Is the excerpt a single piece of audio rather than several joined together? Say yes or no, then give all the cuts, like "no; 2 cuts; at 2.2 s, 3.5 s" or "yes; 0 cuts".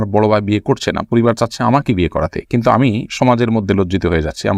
yes; 0 cuts